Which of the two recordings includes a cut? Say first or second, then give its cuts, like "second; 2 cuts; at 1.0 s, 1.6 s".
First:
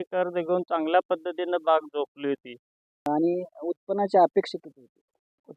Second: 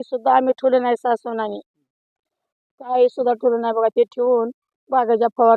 first; 1 cut; at 3.1 s